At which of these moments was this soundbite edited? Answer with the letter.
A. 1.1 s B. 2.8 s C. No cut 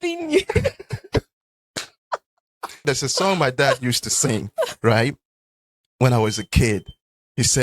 B